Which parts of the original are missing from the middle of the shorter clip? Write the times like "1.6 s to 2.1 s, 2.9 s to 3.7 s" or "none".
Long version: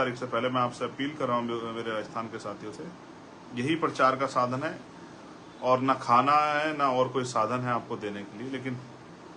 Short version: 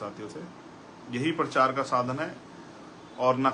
none